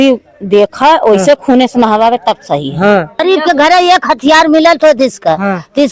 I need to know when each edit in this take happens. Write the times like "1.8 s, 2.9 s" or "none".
3.1 s